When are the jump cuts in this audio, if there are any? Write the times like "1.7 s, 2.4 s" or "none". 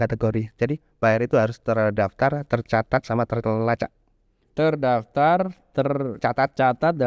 none